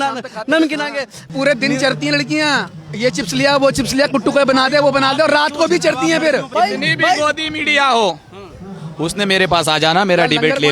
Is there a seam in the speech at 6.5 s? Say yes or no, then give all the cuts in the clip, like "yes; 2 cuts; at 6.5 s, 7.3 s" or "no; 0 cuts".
yes; 2 cuts; at 1.3 s, 6.5 s